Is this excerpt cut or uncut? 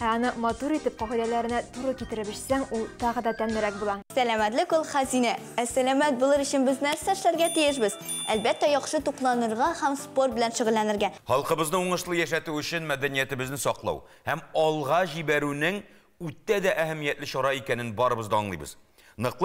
cut